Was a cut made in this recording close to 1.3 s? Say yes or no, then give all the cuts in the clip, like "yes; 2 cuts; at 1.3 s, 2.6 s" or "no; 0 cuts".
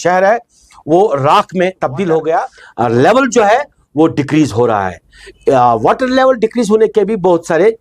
no; 1 cut; at 2.6 s